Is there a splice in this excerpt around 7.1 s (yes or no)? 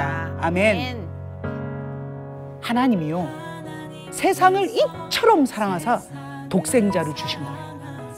yes